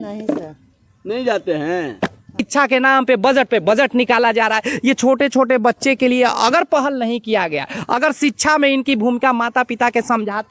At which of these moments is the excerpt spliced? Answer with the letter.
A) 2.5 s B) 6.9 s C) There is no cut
A